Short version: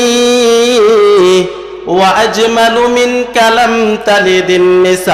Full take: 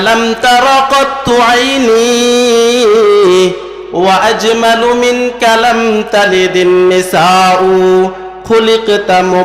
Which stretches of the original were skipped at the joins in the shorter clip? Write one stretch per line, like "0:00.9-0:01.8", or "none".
none